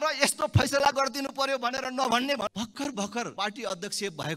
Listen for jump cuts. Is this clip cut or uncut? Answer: cut